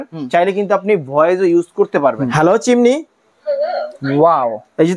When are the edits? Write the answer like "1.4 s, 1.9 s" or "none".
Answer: 2.2 s